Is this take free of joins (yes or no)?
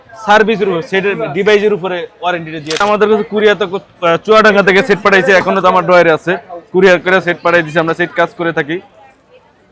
no